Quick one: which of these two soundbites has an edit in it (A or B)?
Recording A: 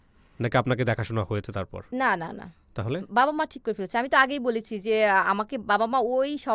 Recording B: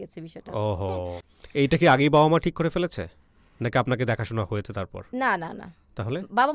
B